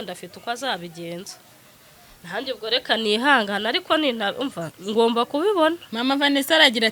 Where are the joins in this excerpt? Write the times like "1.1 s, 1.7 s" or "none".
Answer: none